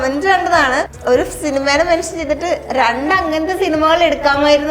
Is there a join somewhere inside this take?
yes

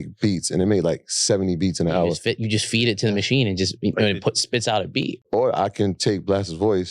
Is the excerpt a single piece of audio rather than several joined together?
no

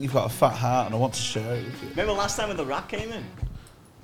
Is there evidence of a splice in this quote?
yes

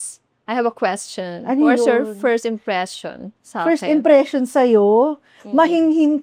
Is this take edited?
no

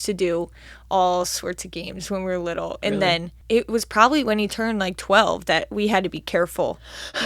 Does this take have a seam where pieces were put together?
yes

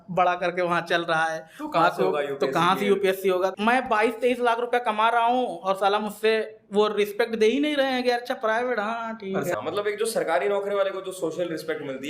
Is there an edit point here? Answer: yes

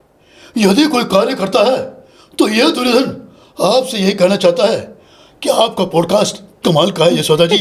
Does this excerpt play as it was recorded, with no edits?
yes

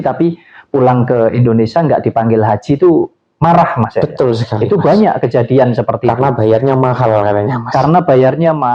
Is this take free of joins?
yes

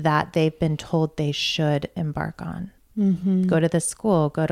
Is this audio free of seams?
no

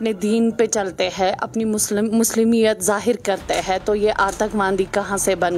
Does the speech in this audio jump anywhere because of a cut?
no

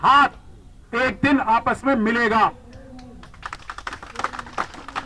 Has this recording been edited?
no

